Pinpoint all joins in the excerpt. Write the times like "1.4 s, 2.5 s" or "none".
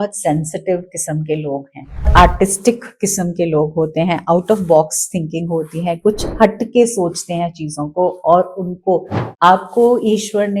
2.1 s, 9.2 s